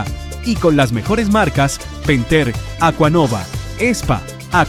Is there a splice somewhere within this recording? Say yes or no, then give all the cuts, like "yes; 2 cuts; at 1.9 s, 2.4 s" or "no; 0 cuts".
no; 0 cuts